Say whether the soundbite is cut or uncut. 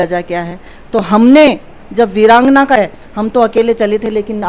cut